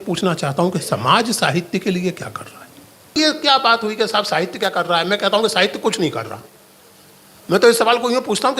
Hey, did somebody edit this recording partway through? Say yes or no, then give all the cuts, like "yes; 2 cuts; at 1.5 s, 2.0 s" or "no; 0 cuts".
yes; 1 cut; at 3.2 s